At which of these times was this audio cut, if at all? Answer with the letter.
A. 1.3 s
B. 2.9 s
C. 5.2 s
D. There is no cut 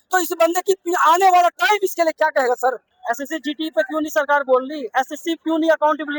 B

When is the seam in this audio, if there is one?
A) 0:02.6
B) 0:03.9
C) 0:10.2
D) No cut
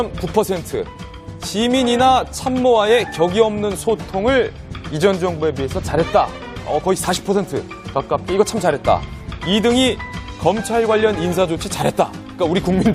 C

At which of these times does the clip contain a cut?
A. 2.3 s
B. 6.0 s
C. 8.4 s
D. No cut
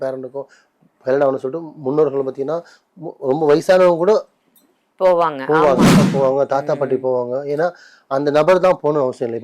B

